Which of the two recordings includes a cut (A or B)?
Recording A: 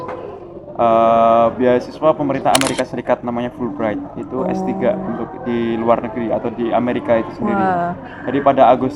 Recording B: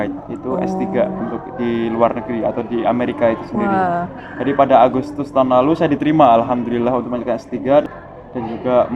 B